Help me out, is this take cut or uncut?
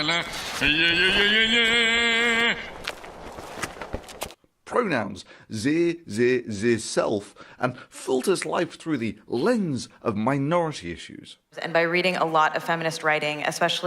cut